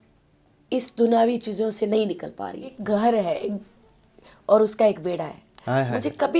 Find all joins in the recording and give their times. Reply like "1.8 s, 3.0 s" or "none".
2.8 s